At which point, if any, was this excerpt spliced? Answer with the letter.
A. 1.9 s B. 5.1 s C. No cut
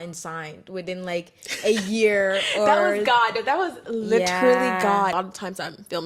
B